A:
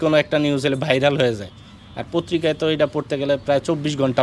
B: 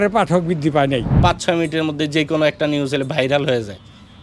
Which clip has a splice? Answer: B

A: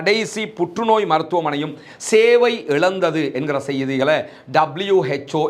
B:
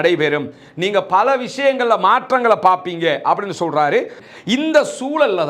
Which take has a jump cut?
B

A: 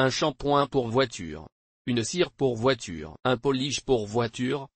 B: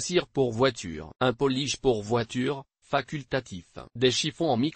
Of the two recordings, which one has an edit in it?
B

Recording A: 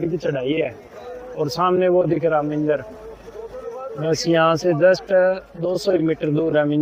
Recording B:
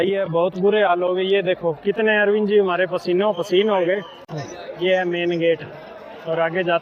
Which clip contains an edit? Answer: B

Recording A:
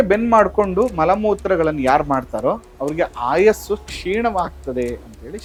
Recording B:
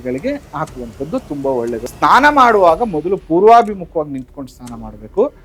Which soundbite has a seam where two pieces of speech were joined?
B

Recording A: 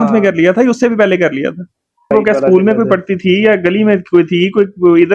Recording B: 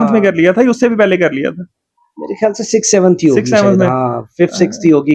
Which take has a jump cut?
A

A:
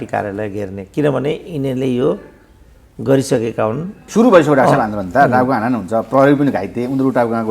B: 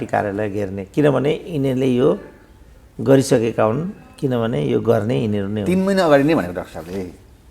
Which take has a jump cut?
A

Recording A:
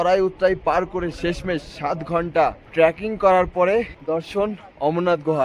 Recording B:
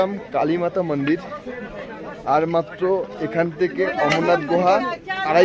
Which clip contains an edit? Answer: A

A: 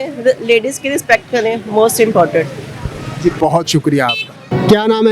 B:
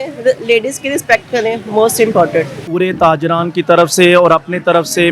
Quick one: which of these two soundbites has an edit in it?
B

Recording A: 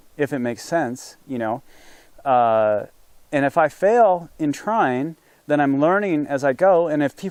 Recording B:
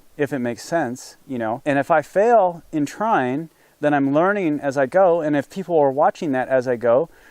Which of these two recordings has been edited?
B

